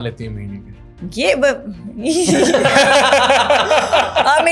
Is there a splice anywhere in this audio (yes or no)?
no